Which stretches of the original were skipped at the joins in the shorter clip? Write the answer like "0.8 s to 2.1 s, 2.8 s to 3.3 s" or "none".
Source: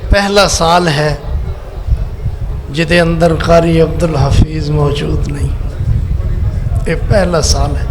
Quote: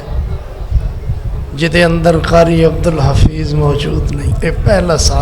5.5 s to 6.7 s